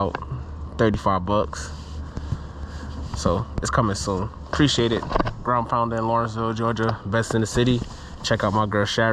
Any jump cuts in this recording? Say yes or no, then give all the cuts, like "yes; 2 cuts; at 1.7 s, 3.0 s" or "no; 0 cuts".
no; 0 cuts